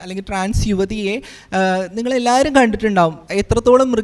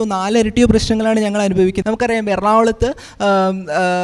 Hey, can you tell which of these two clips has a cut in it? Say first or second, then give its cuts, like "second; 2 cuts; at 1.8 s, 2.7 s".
second; 1 cut; at 1.8 s